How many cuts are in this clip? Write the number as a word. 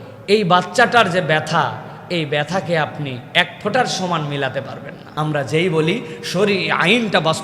one